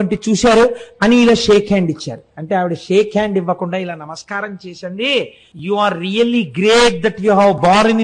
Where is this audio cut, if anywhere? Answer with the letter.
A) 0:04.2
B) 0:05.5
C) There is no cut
B